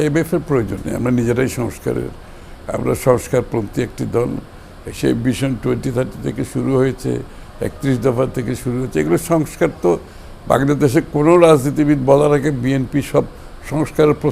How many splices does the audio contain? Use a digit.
0